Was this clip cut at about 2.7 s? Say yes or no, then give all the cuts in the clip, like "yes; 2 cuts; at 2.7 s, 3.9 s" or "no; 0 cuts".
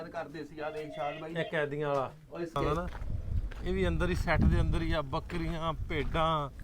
yes; 1 cut; at 2.7 s